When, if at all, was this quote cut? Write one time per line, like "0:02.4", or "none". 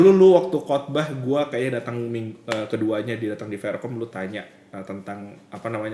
none

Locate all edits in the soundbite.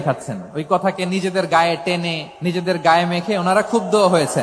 0:02.2

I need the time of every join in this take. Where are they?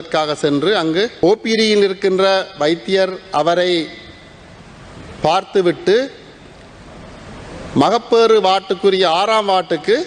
0:01.2

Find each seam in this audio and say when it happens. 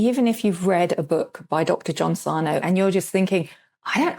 0:02.6

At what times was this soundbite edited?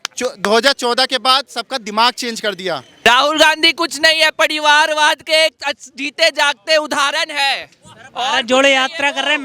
0:03.0

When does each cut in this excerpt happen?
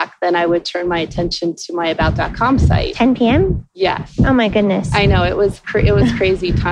none

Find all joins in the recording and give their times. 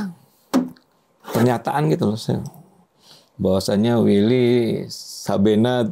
none

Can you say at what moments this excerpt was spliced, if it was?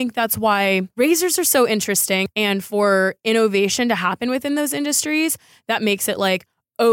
0:00.9
0:02.2

